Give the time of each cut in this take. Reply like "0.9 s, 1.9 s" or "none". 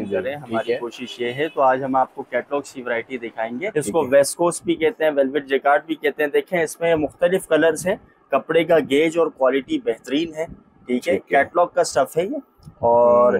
3.7 s